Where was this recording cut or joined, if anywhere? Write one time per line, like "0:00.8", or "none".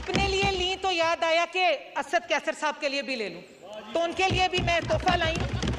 none